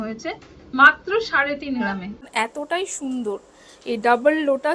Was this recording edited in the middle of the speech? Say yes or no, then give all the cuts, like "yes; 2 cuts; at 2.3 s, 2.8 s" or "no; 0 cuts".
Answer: yes; 1 cut; at 2.2 s